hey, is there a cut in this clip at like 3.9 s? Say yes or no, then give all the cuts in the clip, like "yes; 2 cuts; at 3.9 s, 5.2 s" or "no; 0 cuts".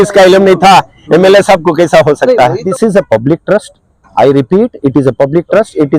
no; 1 cut; at 2.6 s